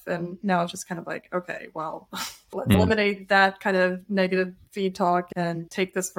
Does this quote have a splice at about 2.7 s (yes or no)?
yes